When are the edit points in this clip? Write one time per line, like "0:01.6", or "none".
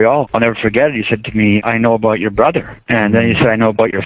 0:01.6
0:02.7